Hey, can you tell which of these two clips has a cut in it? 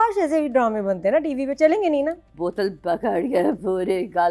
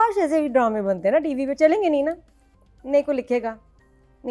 first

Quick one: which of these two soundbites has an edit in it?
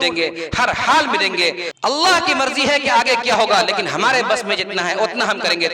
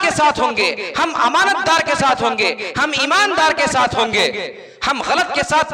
first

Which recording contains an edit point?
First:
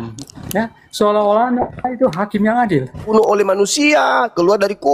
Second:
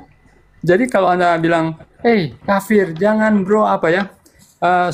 first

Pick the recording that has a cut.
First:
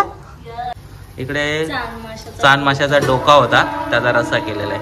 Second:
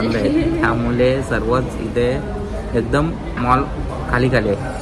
first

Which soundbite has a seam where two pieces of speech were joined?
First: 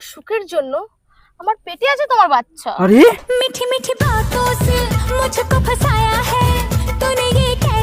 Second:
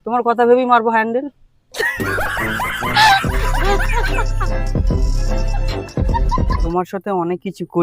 second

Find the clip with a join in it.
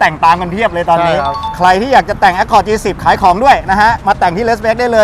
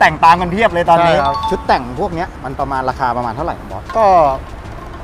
second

